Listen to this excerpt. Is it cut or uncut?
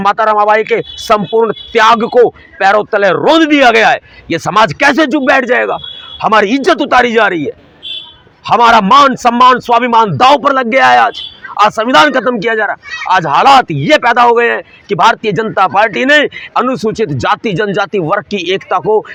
uncut